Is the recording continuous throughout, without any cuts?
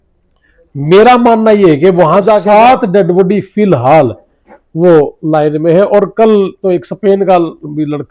no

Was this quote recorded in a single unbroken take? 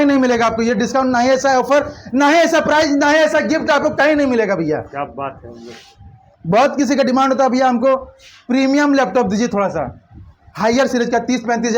yes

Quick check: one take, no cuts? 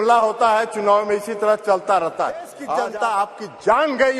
no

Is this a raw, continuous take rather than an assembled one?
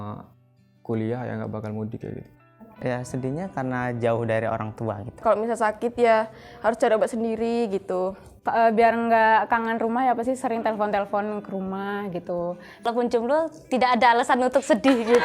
no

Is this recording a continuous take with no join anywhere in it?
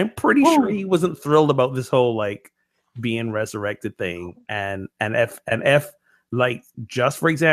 yes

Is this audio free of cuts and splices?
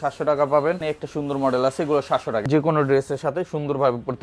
no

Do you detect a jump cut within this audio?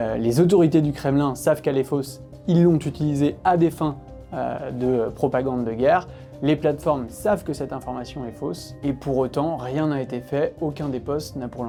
no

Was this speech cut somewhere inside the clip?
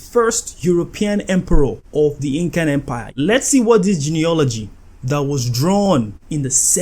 yes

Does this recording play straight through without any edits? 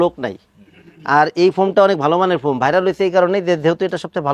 yes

